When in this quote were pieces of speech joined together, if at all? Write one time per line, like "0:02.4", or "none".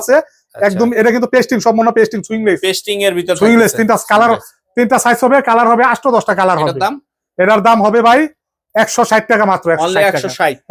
none